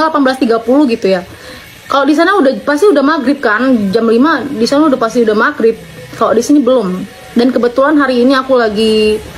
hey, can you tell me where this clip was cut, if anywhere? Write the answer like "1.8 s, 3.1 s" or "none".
none